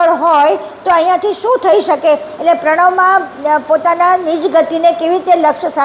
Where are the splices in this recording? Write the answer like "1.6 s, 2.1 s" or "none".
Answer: none